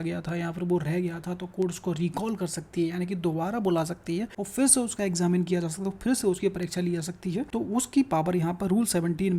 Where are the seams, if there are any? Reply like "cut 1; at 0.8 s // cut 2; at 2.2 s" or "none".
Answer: cut 1; at 4.4 s // cut 2; at 7.5 s